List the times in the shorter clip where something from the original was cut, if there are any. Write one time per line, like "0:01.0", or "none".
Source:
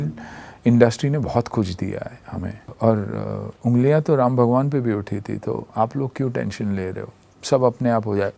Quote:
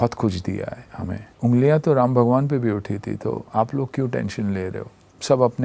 0:01.3